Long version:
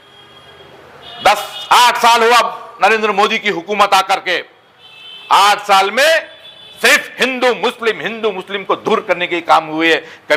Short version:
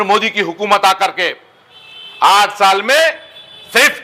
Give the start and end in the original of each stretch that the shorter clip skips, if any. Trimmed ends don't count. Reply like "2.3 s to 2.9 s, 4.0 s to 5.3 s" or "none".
none